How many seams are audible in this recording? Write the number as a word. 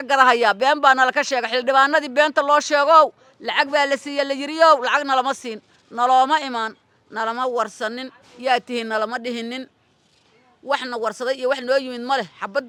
zero